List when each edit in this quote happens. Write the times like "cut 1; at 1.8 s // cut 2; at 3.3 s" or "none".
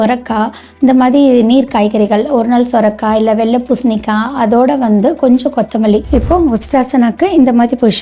cut 1; at 6.1 s